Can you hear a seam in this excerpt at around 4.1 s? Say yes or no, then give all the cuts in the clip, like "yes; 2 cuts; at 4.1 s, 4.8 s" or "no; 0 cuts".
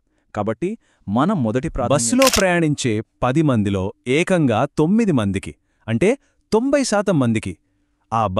no; 1 cut; at 1.8 s